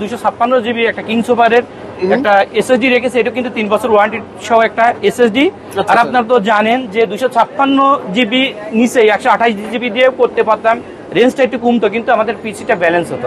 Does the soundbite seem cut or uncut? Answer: uncut